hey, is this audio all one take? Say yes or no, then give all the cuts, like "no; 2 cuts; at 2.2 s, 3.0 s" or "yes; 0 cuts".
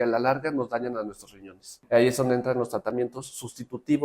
no; 1 cut; at 1.8 s